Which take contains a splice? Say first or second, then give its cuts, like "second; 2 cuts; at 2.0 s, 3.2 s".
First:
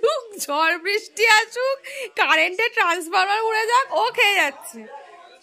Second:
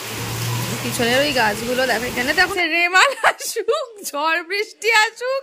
second; 1 cut; at 2.5 s